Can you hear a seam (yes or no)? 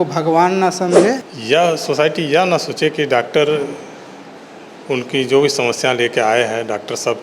yes